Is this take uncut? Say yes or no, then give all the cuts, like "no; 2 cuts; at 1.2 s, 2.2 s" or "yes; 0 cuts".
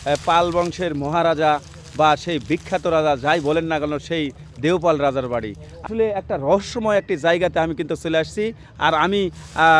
no; 1 cut; at 5.7 s